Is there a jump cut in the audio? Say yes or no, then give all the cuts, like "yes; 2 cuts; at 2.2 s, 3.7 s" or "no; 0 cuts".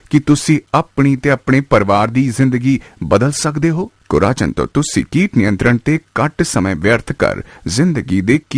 yes; 1 cut; at 3.9 s